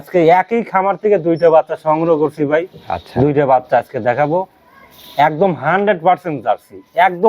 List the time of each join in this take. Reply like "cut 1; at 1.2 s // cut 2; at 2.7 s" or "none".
none

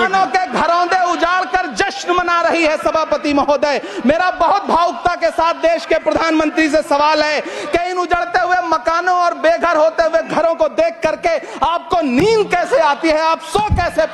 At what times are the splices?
none

